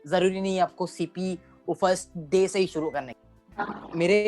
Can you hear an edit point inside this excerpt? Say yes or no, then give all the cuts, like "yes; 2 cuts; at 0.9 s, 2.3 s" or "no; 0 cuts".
yes; 1 cut; at 3.2 s